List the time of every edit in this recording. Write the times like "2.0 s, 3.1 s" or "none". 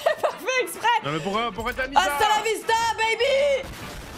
none